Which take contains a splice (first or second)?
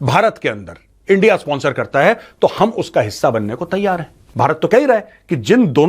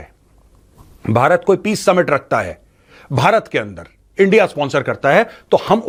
first